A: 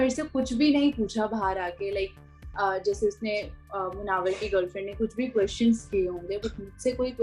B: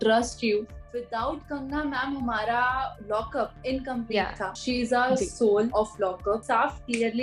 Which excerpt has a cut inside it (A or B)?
B